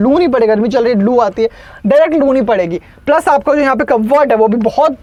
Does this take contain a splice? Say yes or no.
no